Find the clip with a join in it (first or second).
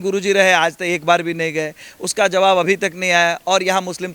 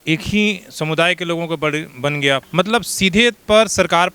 second